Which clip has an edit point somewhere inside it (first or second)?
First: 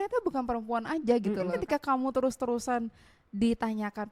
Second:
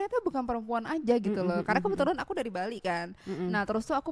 first